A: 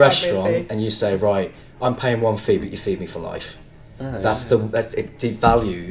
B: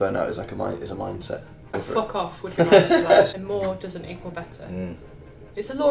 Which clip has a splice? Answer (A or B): B